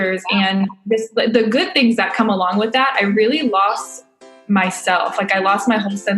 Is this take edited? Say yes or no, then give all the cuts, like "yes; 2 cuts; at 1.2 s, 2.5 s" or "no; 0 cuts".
no; 0 cuts